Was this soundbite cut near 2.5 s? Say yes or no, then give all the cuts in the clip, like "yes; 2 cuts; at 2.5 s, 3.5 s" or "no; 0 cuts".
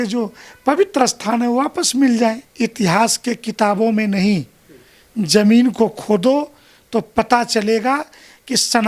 yes; 1 cut; at 2.5 s